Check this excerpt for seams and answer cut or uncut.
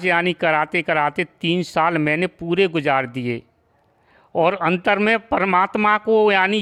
uncut